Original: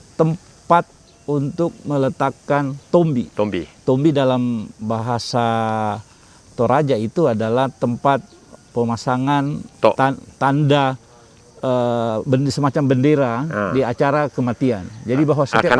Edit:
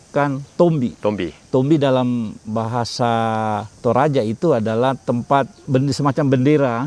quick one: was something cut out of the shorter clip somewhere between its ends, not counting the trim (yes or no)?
yes